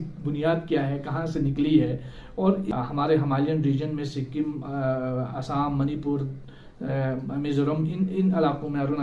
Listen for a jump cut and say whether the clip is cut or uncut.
cut